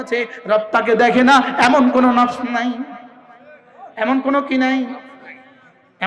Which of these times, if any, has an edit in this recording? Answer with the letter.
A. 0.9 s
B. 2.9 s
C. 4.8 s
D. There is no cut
D